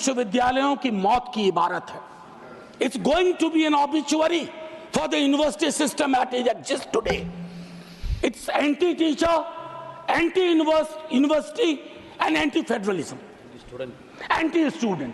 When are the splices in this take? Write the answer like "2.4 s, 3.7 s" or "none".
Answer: none